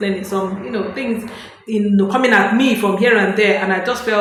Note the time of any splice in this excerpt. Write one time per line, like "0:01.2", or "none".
none